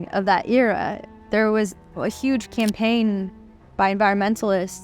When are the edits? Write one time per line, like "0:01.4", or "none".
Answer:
0:01.0
0:02.0